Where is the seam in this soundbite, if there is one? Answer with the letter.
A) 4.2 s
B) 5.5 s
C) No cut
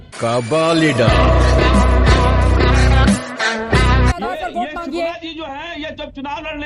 A